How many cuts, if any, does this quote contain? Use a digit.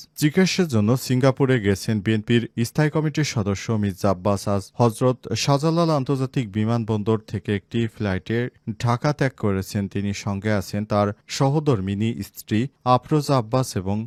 0